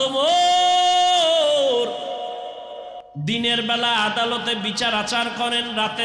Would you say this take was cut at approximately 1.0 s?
no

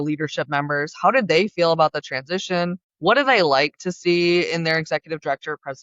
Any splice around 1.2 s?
no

